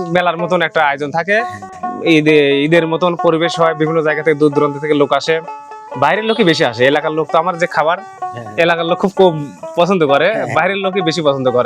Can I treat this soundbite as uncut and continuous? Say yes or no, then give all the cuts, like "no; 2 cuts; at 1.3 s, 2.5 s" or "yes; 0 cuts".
yes; 0 cuts